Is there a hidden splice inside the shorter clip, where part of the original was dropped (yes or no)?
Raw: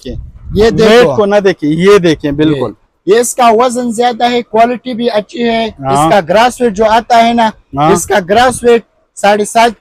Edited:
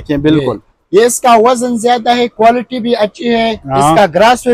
no